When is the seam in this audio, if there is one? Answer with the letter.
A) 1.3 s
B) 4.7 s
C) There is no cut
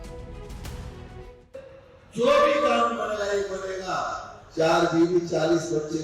A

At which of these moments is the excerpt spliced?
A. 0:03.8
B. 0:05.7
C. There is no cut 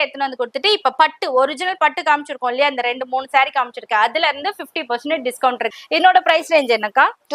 B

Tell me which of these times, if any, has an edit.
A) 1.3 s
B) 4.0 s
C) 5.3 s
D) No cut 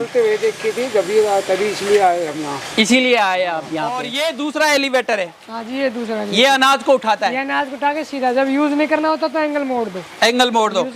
B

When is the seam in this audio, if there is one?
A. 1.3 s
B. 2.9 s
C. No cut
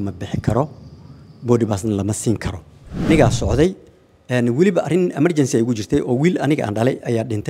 B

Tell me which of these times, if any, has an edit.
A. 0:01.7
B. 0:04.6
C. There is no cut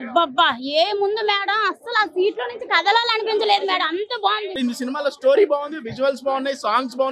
B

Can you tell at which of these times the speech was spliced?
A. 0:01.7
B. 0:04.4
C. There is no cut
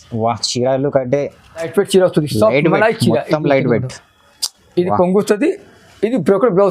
A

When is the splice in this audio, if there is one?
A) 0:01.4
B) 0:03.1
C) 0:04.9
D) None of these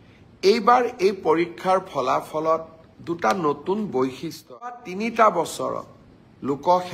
C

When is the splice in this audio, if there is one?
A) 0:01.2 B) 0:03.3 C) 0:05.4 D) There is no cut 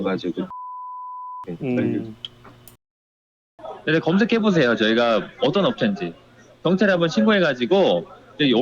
B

